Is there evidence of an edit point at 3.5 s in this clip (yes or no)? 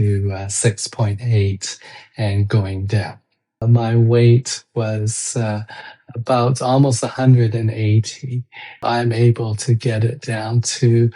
yes